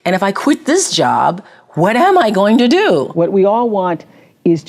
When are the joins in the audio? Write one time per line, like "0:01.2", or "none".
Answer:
0:03.1